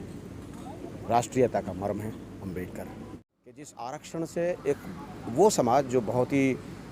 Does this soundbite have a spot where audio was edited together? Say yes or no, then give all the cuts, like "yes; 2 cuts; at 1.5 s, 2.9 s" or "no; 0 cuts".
yes; 1 cut; at 3.7 s